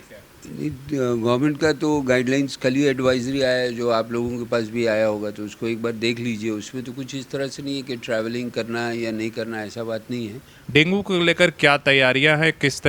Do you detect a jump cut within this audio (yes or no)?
yes